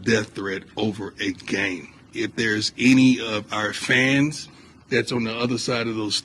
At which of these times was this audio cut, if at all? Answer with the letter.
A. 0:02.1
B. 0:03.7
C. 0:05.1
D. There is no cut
A